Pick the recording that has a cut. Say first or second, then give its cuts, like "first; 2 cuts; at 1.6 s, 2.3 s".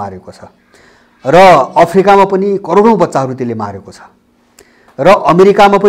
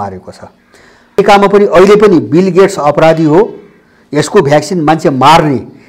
second; 1 cut; at 1.2 s